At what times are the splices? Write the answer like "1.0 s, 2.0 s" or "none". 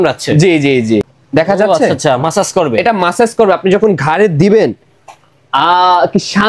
1.2 s